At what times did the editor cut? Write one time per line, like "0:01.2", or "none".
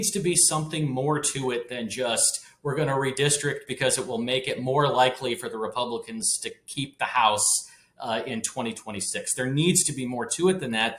none